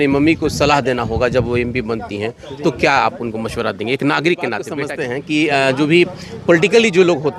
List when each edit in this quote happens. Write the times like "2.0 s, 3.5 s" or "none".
4.8 s

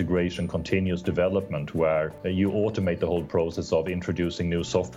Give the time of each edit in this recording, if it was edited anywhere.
2.2 s

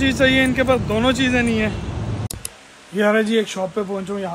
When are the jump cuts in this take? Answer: 2.2 s

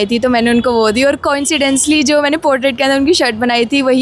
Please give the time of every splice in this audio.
none

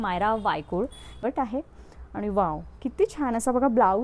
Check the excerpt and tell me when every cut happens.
1.2 s

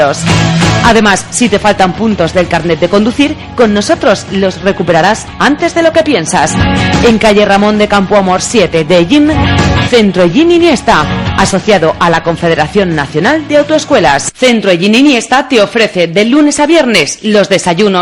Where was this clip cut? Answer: none

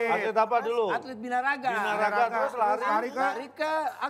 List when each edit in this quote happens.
none

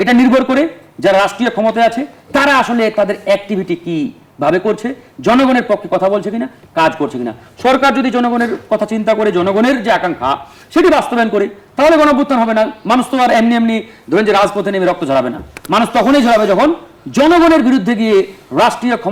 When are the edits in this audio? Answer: none

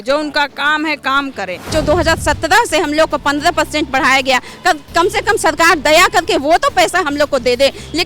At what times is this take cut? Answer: 1.7 s

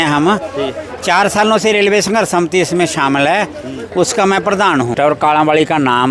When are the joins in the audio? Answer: 4.9 s

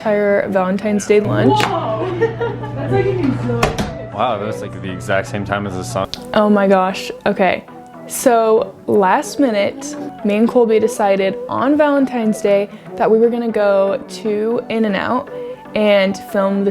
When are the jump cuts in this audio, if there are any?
1.5 s, 6.2 s

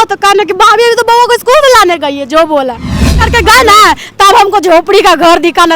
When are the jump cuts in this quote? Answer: 3.2 s

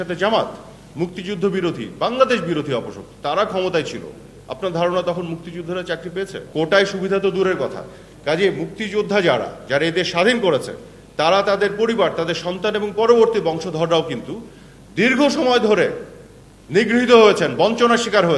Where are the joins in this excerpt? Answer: none

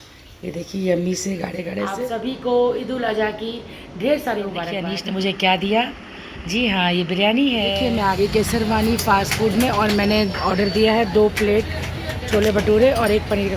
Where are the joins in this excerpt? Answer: 1.9 s, 4.8 s, 7.7 s

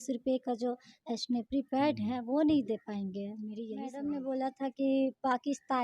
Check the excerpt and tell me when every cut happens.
3.9 s

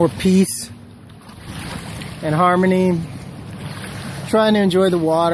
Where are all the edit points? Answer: none

